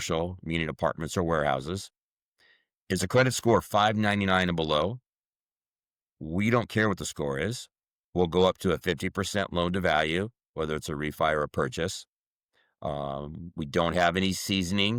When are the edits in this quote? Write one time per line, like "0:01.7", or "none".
none